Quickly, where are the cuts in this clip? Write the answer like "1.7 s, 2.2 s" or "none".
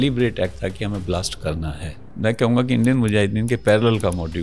2.1 s